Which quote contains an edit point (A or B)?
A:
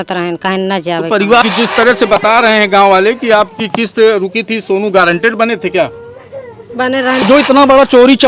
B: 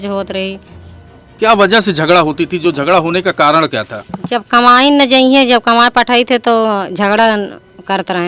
A